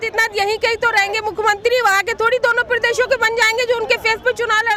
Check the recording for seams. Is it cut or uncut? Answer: uncut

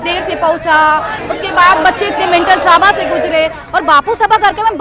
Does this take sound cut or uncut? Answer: cut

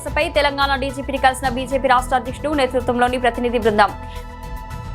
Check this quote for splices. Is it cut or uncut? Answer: cut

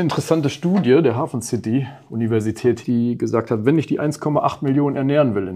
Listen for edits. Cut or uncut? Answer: cut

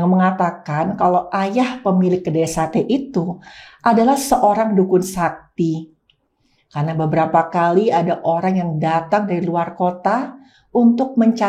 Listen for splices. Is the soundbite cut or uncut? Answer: uncut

